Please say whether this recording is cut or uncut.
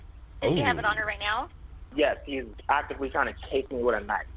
uncut